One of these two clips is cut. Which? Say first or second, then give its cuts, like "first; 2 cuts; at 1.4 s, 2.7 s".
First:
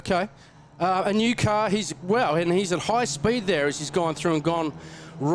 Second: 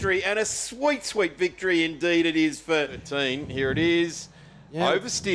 second; 1 cut; at 3.0 s